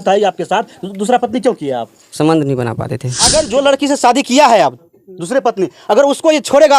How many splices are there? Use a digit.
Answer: 1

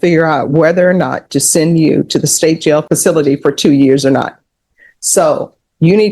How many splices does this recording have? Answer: 1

